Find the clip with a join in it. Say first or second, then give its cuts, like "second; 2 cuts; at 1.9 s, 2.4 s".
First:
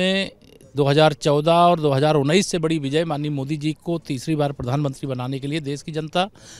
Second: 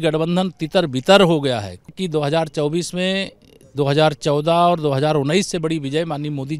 second; 1 cut; at 1.9 s